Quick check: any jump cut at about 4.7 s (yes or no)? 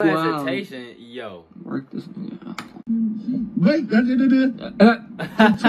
no